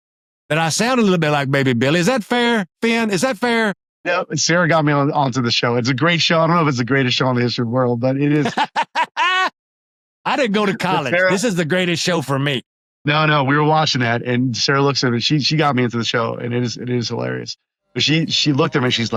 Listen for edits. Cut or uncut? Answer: uncut